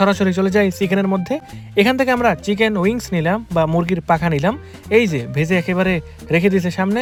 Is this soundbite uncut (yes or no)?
yes